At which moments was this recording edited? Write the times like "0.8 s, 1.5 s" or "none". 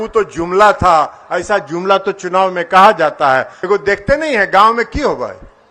3.5 s